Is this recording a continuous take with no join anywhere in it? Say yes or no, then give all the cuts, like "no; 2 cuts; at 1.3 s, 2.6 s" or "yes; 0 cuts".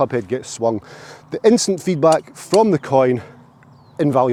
yes; 0 cuts